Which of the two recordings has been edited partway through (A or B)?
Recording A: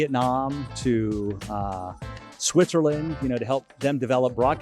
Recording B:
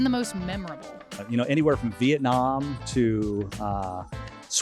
B